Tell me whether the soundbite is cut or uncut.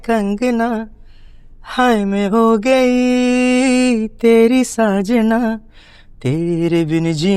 uncut